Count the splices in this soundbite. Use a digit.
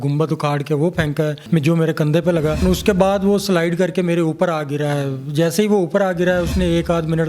2